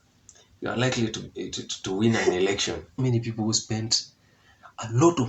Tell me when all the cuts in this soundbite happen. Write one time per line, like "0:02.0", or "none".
0:02.9

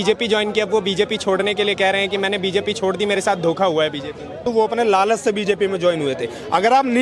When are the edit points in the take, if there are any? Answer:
0:04.5

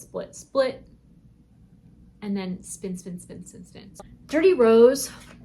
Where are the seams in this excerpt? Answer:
0:03.9

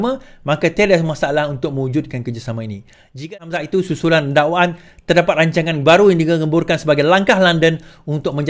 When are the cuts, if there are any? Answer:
0:03.3

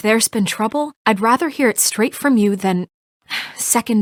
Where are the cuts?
none

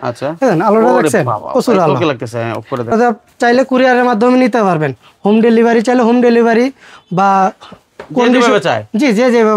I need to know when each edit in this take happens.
0:02.9

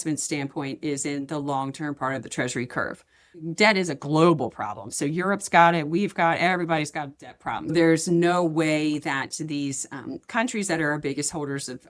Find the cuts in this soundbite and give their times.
0:03.3
0:07.7

